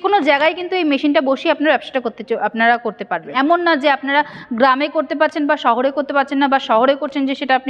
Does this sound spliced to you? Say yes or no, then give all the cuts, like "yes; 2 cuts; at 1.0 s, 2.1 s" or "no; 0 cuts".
yes; 1 cut; at 3.3 s